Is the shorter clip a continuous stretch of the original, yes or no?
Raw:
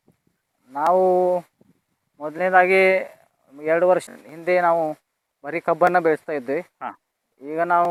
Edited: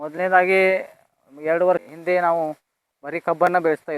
no